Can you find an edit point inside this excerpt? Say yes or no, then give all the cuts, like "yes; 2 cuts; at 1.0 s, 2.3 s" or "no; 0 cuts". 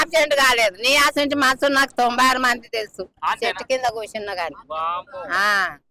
no; 0 cuts